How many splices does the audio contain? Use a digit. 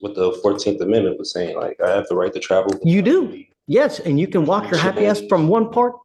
0